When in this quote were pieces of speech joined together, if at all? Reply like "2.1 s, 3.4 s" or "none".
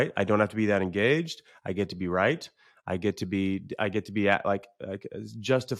none